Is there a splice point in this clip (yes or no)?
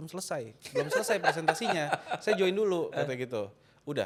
no